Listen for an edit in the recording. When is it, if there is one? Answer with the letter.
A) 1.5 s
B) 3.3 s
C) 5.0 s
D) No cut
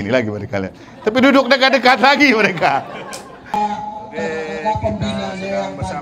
B